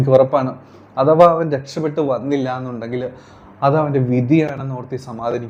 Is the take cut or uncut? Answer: uncut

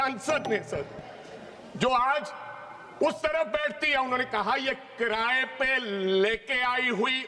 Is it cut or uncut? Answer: uncut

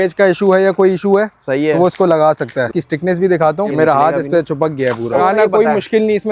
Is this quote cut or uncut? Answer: cut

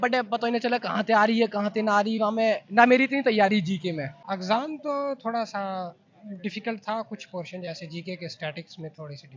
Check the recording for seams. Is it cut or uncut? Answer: cut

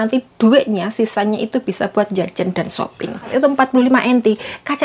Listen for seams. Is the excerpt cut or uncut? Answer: cut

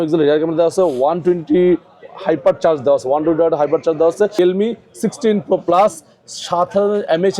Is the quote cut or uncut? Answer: cut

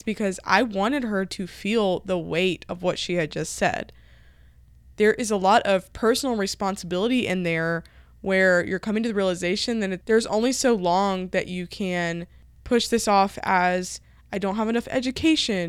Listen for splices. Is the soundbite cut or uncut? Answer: uncut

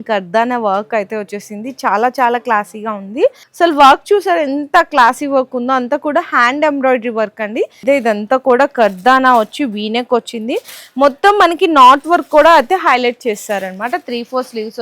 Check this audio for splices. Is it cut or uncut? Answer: cut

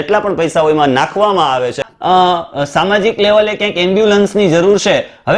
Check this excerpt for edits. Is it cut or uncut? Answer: cut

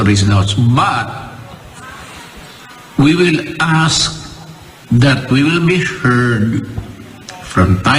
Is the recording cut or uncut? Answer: uncut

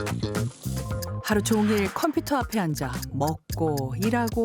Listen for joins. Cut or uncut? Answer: cut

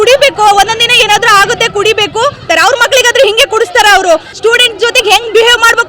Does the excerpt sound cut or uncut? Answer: cut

